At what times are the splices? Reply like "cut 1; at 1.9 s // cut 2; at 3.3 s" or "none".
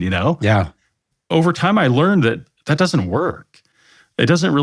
cut 1; at 1.1 s // cut 2; at 2.5 s